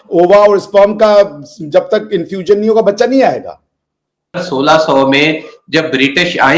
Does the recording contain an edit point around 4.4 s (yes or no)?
yes